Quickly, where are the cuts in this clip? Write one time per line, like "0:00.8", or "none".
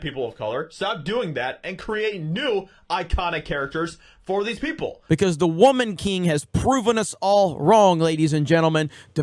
0:04.9